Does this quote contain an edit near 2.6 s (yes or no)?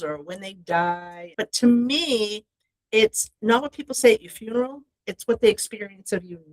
no